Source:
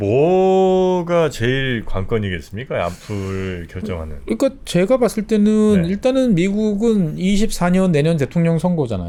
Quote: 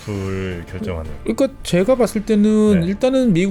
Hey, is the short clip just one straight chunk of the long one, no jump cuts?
yes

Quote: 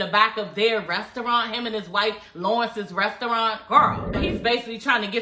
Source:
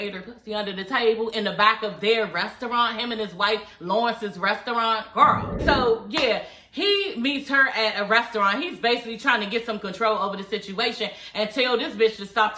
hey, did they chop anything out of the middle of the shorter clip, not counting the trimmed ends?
yes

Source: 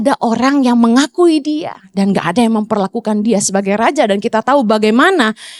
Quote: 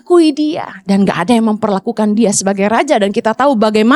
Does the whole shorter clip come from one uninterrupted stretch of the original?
yes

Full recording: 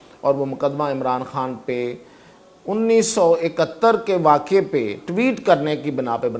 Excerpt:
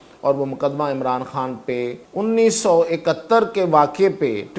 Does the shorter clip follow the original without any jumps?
no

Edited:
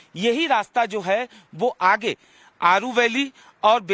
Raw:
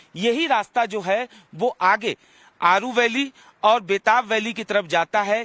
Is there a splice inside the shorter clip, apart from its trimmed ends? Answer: no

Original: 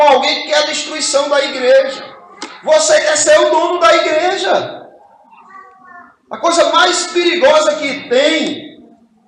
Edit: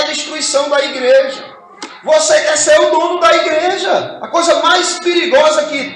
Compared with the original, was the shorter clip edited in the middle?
yes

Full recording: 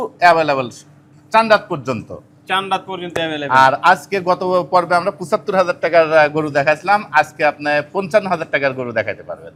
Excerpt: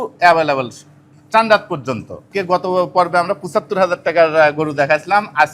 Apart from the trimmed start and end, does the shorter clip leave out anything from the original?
yes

